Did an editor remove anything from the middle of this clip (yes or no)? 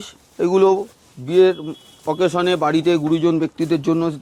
no